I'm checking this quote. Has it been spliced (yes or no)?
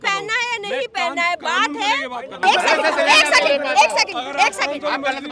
yes